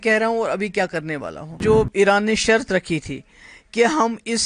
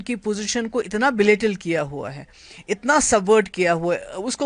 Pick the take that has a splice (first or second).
first